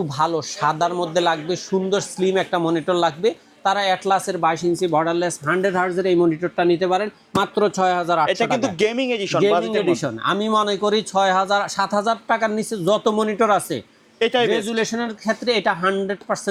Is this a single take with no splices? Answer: yes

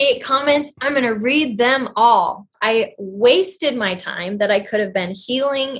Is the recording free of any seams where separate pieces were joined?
no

